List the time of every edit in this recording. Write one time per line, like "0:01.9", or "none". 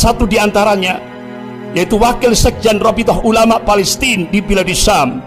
none